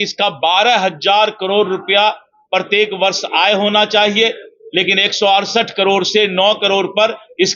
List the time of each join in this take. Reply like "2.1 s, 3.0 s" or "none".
none